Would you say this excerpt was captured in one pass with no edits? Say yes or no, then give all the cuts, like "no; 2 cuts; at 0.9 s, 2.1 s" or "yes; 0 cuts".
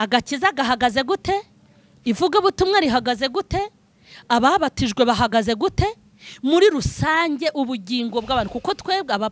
yes; 0 cuts